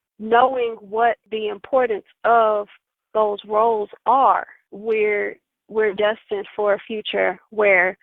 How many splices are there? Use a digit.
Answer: 1